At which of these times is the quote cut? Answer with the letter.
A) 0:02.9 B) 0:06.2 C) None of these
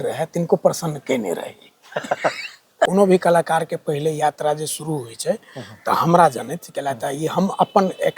A